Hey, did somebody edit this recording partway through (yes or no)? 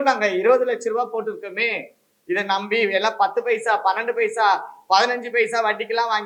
no